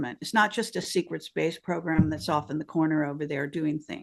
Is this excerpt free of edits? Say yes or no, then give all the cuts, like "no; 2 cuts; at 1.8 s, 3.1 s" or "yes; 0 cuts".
yes; 0 cuts